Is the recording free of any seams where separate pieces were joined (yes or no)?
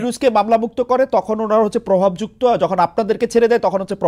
yes